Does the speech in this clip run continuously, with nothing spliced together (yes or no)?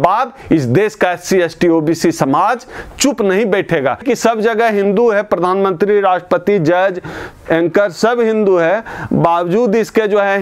no